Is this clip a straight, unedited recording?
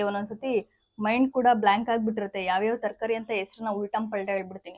yes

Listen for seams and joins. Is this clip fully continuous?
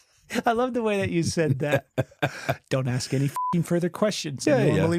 yes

